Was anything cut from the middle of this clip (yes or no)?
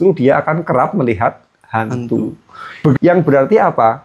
yes